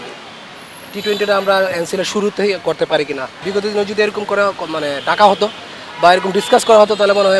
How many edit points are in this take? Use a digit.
1